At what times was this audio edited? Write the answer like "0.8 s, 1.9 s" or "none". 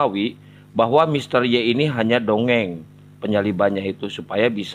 none